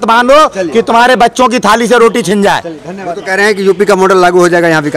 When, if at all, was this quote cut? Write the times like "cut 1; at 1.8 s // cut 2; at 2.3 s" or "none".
cut 1; at 2.8 s